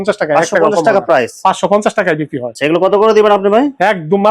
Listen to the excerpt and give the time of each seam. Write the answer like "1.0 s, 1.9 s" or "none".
none